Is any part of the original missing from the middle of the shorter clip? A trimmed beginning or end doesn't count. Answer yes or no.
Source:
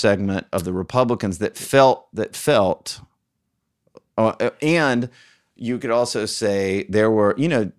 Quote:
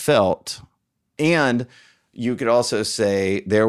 yes